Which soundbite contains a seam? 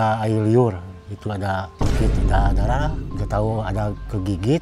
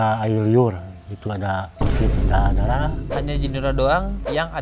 second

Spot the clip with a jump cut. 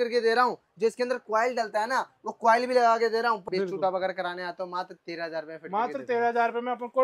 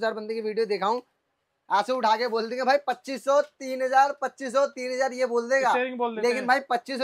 first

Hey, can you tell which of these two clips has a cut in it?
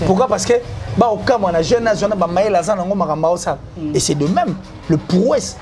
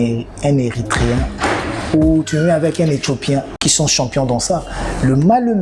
second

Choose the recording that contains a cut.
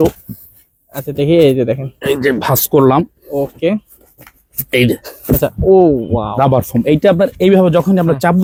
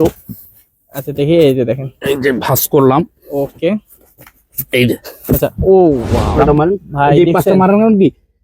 second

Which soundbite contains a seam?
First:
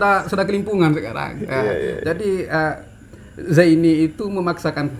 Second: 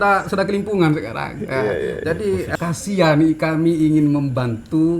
second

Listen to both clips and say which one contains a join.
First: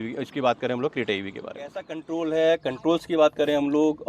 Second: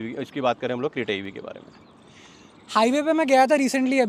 first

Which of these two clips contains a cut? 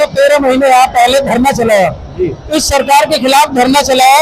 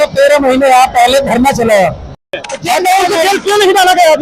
second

